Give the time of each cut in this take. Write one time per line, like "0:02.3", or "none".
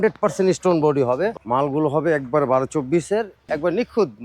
0:01.4
0:03.4